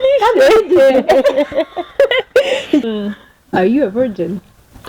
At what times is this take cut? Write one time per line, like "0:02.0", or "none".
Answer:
0:02.8